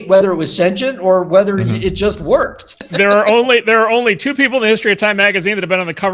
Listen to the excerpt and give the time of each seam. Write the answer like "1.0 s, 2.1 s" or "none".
2.8 s